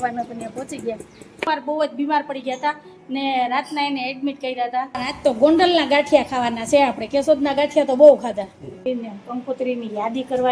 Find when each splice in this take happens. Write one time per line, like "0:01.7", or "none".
0:01.5
0:05.0
0:08.8